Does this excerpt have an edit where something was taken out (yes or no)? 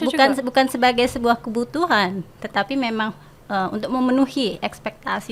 no